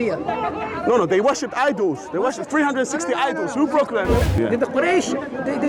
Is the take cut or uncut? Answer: cut